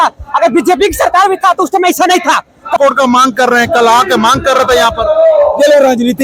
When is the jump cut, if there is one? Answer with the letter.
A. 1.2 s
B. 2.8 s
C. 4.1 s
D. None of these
B